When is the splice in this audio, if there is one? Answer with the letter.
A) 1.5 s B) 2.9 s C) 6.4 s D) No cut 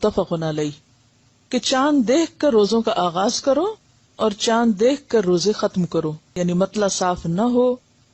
C